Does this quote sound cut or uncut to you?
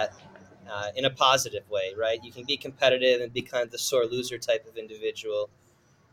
uncut